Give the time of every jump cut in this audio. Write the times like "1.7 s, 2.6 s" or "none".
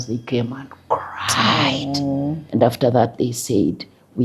2.4 s